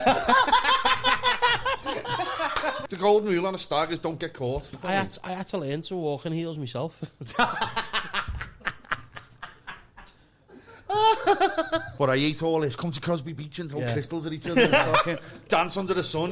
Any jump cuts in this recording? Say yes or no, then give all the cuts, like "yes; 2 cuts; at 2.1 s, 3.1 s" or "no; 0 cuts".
yes; 3 cuts; at 2.8 s, 4.8 s, 11.9 s